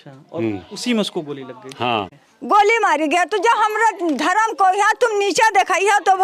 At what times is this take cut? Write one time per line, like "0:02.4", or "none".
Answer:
0:02.1